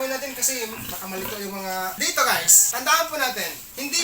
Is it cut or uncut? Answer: cut